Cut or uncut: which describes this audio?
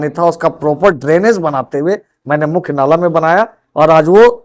uncut